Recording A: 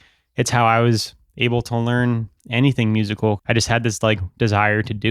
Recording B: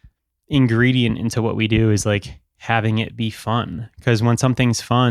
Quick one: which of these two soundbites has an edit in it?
A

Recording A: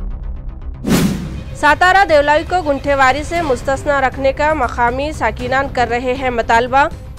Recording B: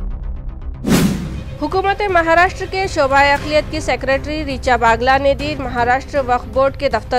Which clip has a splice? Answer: A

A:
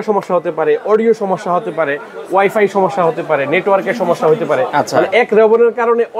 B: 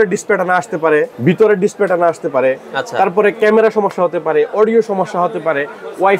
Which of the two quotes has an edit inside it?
B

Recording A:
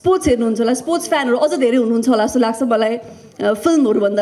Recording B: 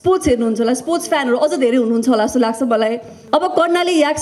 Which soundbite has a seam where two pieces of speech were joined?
B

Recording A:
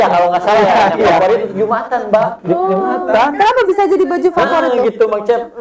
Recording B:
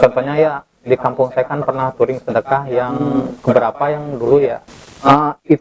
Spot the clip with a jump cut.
B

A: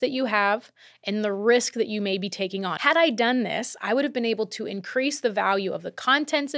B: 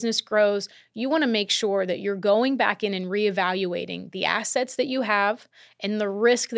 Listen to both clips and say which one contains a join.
A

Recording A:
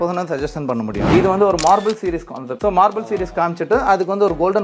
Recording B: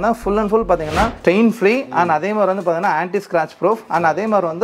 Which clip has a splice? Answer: A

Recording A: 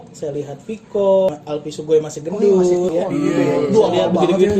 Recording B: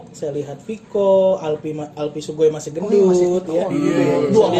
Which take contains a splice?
A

